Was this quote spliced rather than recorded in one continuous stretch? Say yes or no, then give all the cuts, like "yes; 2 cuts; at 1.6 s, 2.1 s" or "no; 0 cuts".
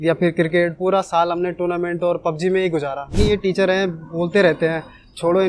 yes; 1 cut; at 3.2 s